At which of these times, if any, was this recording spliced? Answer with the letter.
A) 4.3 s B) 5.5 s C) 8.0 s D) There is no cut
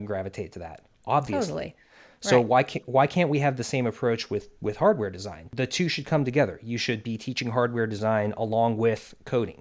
B